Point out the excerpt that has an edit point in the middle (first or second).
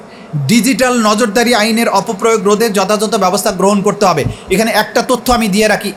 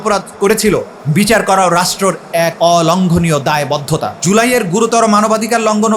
second